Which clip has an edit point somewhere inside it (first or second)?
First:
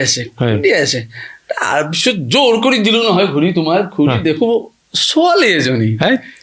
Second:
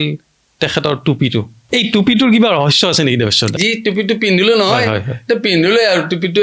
second